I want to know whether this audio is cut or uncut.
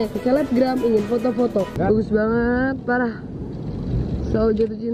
cut